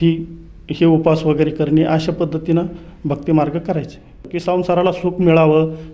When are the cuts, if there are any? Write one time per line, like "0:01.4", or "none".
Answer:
0:04.3